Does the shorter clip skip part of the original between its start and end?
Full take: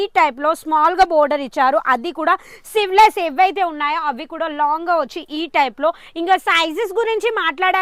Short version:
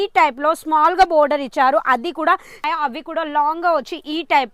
yes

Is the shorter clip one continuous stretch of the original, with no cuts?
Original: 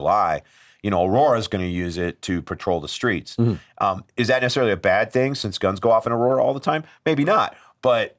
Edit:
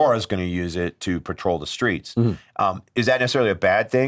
yes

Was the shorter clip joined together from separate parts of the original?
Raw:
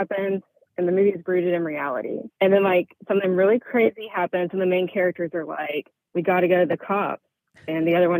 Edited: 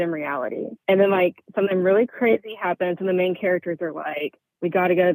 no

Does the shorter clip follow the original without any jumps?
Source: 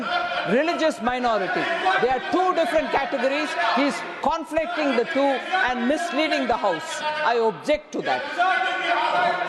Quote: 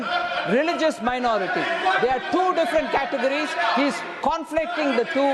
yes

